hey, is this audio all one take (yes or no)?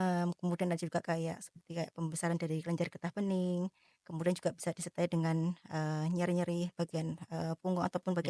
yes